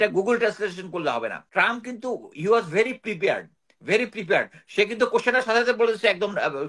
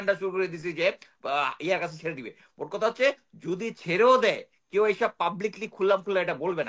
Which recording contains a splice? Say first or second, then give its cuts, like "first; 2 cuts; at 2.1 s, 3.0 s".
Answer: first; 1 cut; at 1.4 s